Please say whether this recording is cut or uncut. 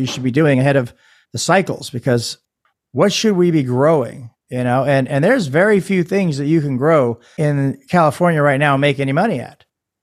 cut